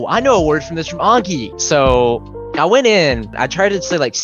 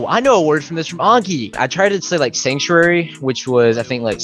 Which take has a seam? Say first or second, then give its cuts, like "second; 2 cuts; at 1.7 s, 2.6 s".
second; 1 cut; at 1.5 s